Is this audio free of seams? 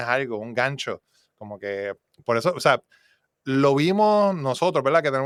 yes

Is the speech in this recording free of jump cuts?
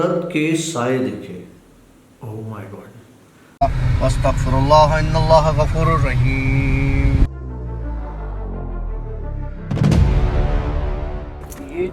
no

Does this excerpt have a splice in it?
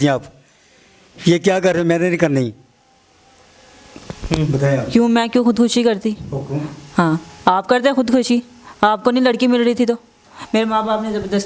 no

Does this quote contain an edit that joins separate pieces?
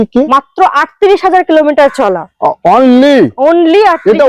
no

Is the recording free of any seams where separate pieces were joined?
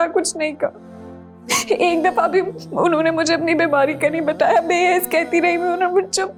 yes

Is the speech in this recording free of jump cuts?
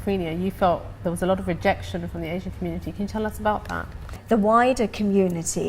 no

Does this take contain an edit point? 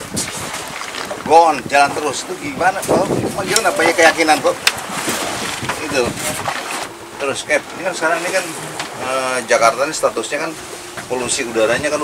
yes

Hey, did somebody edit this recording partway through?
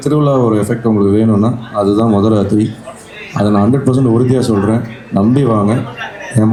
no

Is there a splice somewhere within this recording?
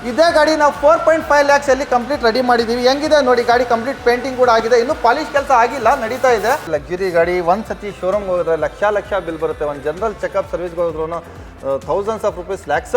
yes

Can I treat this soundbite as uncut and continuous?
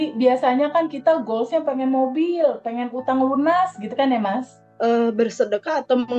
no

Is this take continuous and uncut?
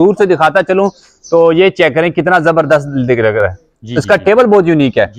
yes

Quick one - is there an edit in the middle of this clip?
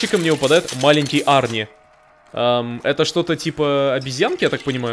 no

